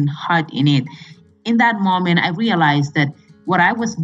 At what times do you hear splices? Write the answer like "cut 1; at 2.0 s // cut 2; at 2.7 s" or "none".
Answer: cut 1; at 1.2 s